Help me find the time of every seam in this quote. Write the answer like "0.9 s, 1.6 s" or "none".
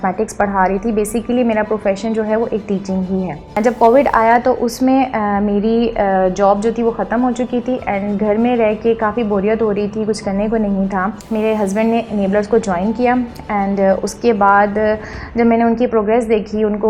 3.6 s, 11.2 s